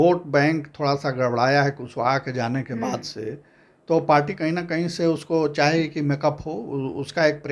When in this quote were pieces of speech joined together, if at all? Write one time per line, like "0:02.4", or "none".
none